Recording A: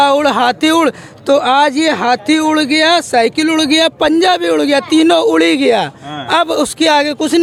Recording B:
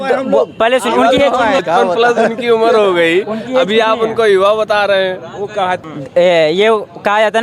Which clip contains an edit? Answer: B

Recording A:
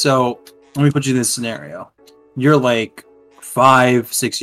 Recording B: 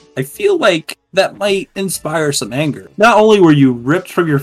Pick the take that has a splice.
B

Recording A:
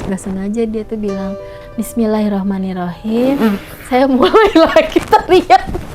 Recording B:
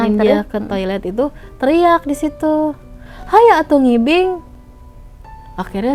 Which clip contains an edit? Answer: A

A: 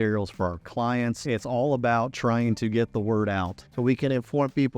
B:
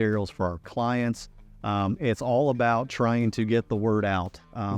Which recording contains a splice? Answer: A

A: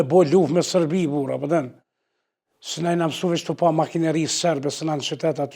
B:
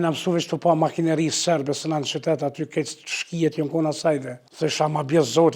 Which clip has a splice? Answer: B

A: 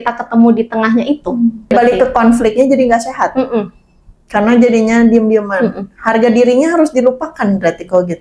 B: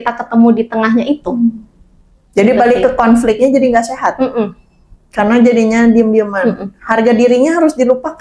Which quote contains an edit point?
A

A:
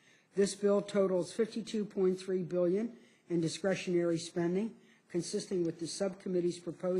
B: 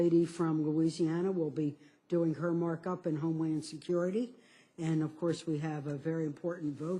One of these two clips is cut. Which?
A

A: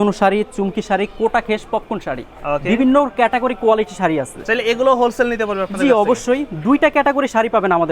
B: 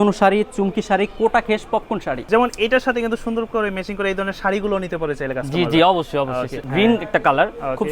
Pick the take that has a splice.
B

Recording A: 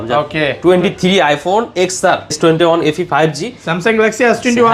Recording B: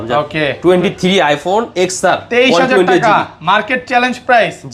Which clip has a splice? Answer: A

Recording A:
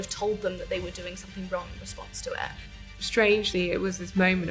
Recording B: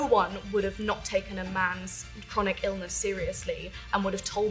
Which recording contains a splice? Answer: A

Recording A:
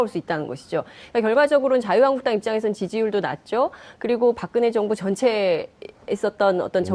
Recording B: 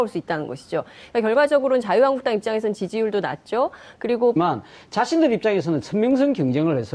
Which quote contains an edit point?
A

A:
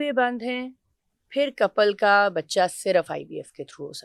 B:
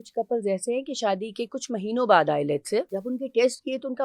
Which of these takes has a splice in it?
B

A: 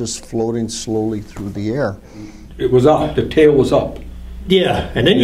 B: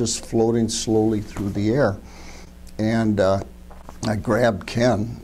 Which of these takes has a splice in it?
A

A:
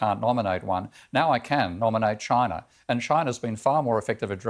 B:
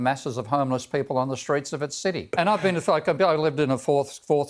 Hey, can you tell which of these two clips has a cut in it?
B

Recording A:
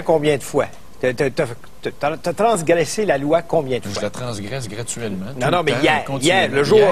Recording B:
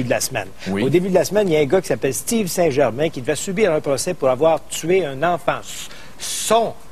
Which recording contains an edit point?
B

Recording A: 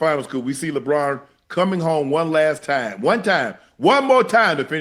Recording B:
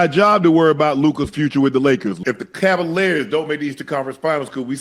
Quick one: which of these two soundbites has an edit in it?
B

